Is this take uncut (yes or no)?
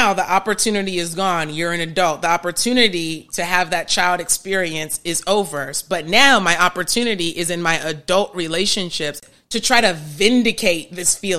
no